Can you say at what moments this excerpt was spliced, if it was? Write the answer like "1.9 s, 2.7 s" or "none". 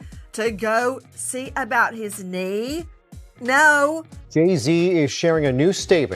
4.1 s